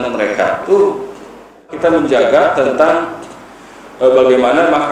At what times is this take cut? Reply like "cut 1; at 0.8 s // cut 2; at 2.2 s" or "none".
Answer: cut 1; at 1.7 s